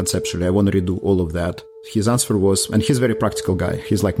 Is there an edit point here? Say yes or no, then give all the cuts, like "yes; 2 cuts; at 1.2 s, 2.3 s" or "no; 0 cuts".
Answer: yes; 1 cut; at 1.6 s